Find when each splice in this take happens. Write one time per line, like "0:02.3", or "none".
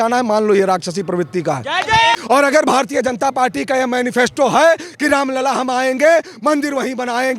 0:02.2